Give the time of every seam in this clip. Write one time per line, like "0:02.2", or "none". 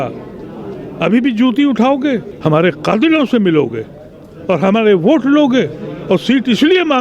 0:02.3